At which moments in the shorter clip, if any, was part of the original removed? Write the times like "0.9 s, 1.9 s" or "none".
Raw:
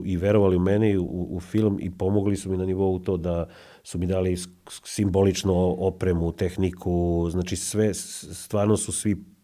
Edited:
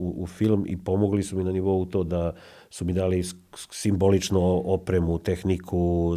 none